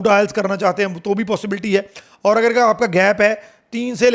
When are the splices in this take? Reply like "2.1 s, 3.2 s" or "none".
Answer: none